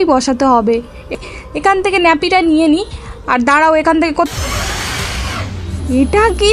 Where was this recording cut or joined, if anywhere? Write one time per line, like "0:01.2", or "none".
0:01.2